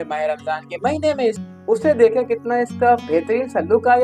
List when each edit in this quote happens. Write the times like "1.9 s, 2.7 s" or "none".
1.4 s